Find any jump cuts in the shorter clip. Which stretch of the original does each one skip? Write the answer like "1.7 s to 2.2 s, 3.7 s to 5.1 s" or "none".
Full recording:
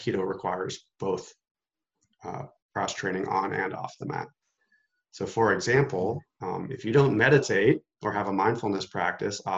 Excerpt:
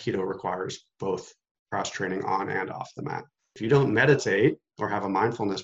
1.5 s to 2.5 s, 4.5 s to 6.7 s